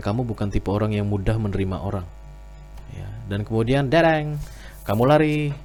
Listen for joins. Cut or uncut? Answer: uncut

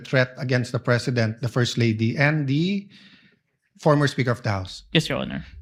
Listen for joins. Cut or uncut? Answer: uncut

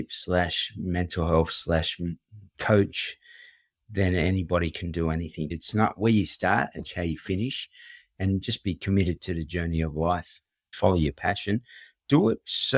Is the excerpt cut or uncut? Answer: cut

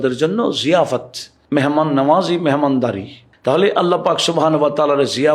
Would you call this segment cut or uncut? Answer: uncut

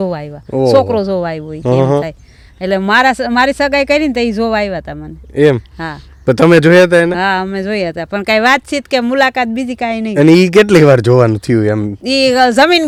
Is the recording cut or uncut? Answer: uncut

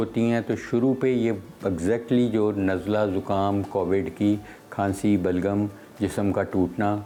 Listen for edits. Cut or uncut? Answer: uncut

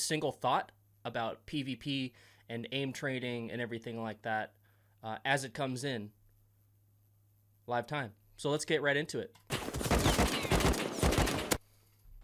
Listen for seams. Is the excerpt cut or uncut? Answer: uncut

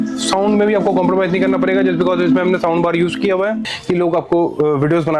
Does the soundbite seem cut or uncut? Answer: cut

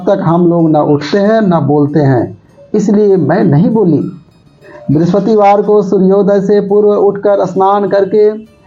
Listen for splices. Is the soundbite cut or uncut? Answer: cut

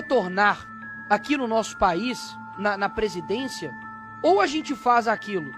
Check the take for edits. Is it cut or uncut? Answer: uncut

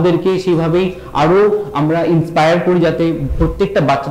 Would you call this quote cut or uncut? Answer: uncut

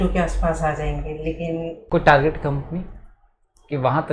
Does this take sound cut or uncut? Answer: cut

